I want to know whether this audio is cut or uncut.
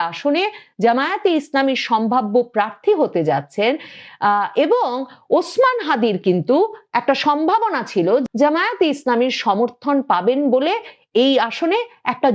cut